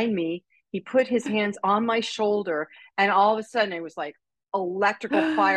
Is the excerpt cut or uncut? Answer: uncut